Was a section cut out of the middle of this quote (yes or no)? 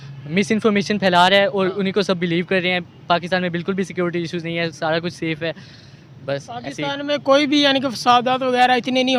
no